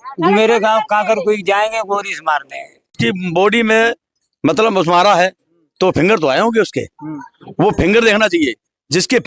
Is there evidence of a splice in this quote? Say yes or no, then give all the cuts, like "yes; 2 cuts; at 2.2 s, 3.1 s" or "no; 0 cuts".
yes; 1 cut; at 3.0 s